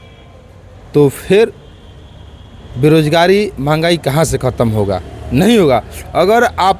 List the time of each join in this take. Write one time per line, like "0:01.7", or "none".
none